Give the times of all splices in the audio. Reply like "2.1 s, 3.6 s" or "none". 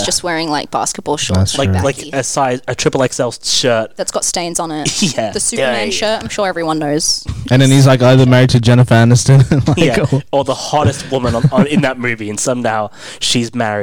none